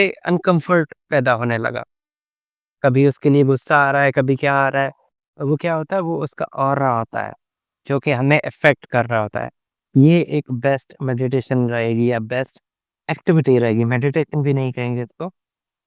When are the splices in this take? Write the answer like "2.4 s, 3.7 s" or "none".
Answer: 9.7 s